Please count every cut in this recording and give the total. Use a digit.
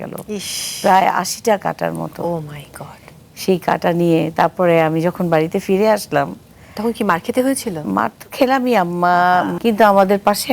1